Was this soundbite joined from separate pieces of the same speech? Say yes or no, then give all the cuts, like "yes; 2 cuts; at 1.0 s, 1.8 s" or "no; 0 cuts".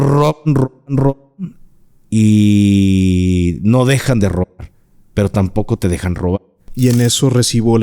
yes; 1 cut; at 6.4 s